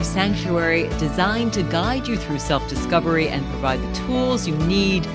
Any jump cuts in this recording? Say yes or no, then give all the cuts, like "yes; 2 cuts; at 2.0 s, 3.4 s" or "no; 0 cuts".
no; 0 cuts